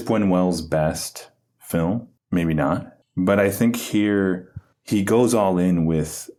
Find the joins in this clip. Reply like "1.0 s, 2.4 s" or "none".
none